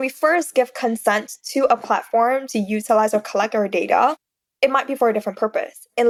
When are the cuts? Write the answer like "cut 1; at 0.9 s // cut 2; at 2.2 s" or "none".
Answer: none